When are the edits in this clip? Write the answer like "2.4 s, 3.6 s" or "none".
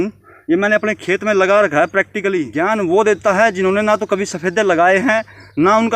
2.5 s